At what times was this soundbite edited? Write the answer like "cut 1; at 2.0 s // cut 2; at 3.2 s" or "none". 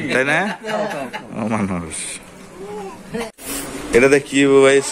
cut 1; at 3.3 s

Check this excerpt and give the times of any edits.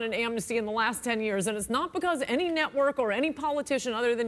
none

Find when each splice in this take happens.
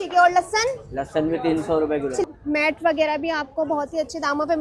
cut 1; at 2.2 s

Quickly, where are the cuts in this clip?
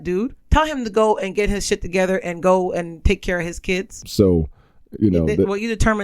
cut 1; at 4.0 s

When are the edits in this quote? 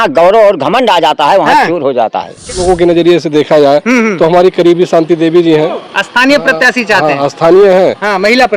cut 1; at 2.5 s

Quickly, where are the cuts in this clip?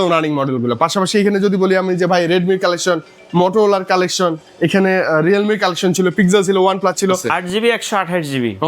cut 1; at 7.2 s

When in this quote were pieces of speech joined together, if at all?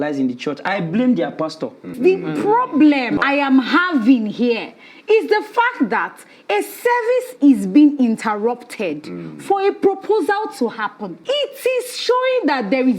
cut 1; at 2.0 s // cut 2; at 3.2 s // cut 3; at 11.1 s

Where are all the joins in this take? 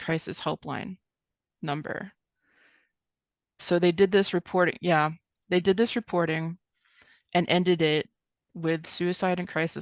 none

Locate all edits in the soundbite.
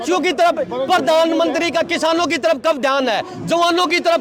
none

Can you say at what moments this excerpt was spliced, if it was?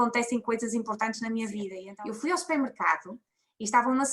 cut 1; at 1.8 s

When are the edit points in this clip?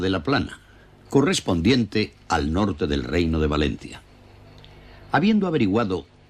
cut 1; at 4.4 s

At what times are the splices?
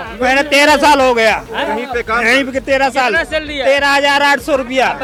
none

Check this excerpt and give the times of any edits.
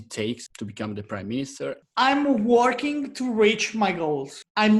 cut 1; at 1.8 s

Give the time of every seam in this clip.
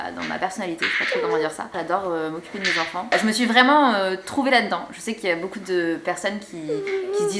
cut 1; at 3.1 s

